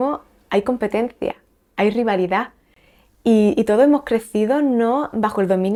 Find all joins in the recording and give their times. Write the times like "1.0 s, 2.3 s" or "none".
none